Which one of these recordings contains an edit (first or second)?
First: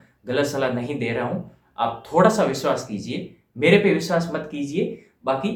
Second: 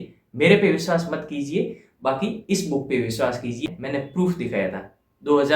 second